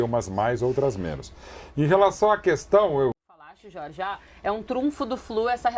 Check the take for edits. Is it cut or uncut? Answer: cut